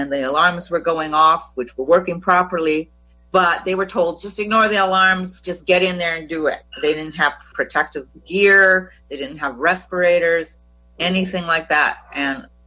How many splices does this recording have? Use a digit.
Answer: 0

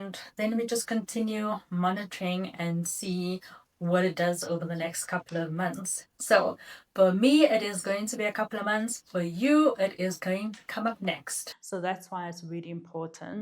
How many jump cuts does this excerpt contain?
1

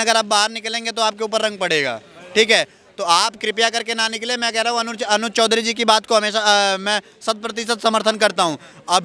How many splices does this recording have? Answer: 0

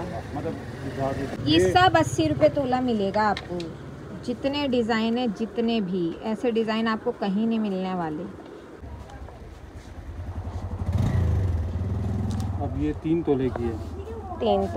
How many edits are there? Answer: 2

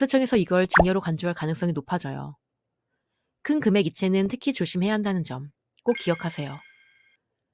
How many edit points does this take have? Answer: 0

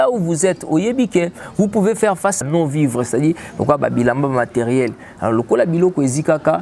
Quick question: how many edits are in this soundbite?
1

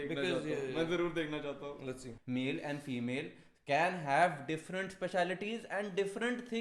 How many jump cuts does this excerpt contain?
1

